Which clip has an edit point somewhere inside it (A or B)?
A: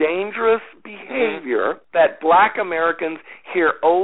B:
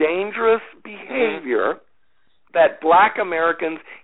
A